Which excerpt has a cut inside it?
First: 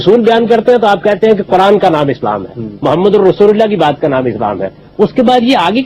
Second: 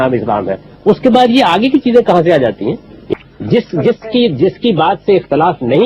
second; 1 cut; at 2.9 s

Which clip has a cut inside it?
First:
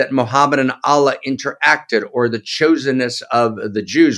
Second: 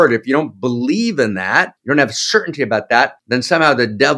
second; 2 cuts; at 1.8 s, 3.2 s

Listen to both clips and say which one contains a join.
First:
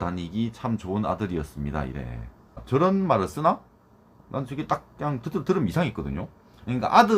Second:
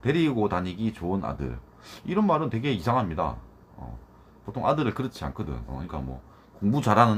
first; 1 cut; at 2.6 s

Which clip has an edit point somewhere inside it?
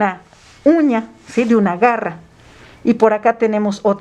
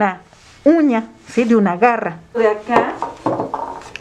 second; 1 cut; at 2.4 s

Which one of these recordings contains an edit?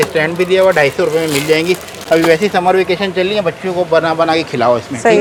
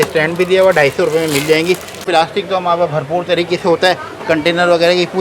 second; 1 cut; at 2.0 s

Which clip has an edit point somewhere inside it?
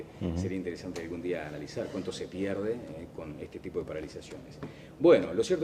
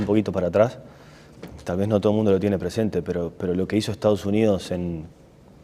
first; 1 cut; at 4.4 s

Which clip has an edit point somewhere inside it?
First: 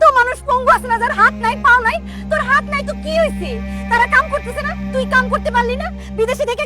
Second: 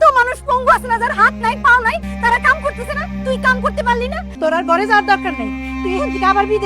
second; 2 cuts; at 2.1 s, 4.2 s

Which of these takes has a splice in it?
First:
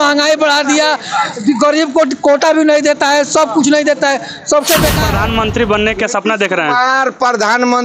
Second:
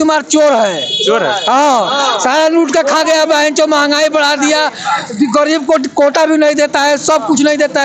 first; 1 cut; at 5.0 s

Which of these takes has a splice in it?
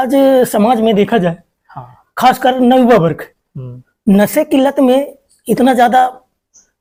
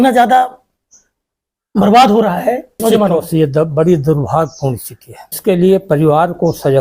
second; 2 cuts; at 2.8 s, 5.4 s

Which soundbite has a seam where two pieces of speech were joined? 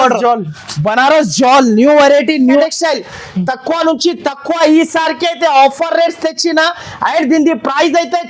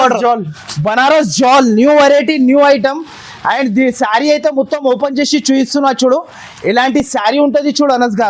first; 1 cut; at 2.6 s

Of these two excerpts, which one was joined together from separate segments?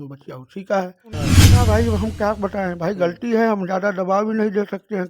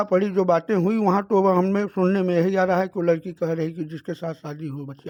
first; 1 cut; at 1.4 s

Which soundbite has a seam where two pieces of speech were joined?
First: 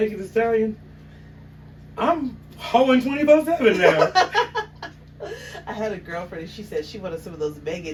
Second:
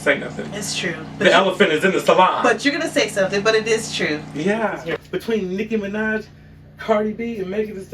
second; 1 cut; at 4.8 s

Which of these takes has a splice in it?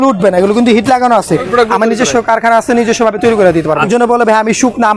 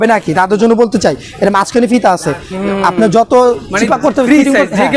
first; 2 cuts; at 1.4 s, 3.9 s

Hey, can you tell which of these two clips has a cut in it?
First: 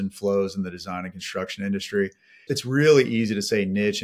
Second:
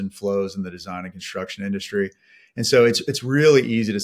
first; 1 cut; at 2.5 s

